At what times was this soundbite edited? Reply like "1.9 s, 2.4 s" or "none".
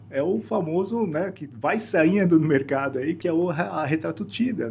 3.2 s